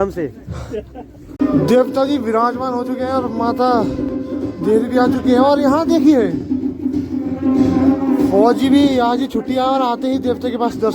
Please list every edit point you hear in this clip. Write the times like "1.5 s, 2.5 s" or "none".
1.2 s

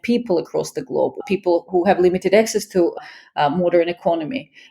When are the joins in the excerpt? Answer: 1.2 s

